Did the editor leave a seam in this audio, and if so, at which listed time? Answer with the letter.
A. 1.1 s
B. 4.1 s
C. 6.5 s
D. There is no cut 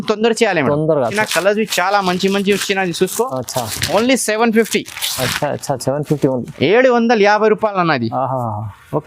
A